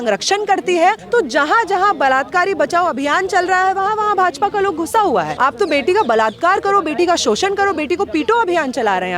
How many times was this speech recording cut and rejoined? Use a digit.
2